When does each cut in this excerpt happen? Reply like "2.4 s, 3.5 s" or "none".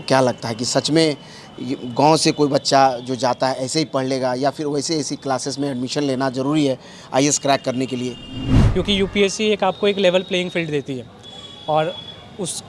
8.6 s